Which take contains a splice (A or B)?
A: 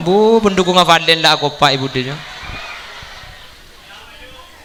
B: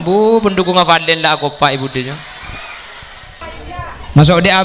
B